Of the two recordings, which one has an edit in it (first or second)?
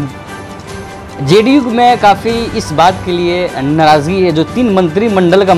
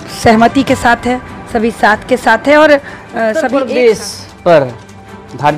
second